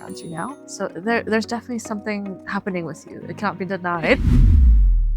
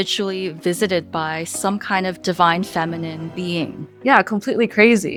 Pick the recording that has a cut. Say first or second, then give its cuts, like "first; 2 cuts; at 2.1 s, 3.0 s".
first; 1 cut; at 4.2 s